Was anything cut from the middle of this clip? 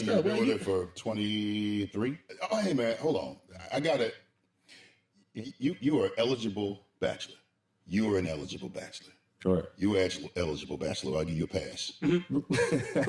yes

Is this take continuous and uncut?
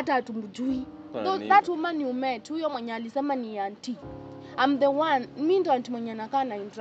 no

